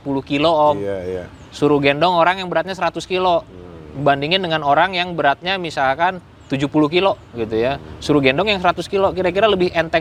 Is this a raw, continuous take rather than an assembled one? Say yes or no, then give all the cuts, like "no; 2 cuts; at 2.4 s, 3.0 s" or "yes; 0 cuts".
yes; 0 cuts